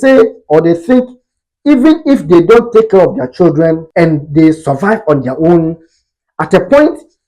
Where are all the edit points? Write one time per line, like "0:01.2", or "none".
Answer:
0:03.8